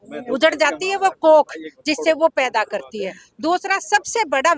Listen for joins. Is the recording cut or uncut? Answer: uncut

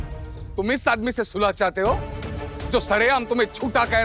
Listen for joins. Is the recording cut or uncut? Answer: uncut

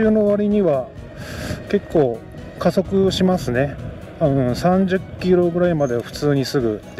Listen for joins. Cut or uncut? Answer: uncut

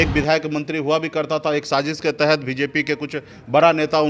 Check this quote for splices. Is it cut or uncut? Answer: uncut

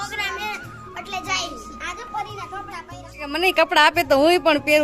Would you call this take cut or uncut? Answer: cut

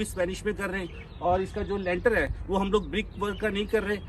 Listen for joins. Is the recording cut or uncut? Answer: uncut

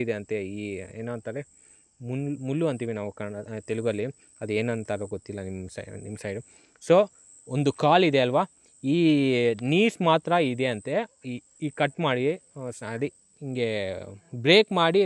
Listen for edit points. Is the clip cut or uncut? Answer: uncut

